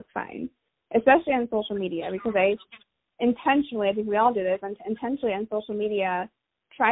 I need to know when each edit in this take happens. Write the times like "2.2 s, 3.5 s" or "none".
none